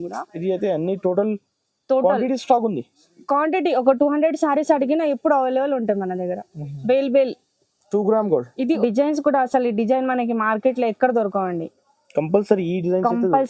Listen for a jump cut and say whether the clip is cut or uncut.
cut